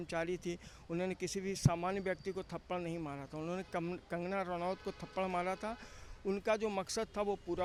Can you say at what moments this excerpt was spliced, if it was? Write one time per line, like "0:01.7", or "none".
none